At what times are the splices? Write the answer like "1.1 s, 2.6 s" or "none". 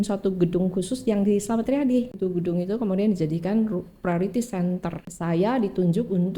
2.1 s, 5.1 s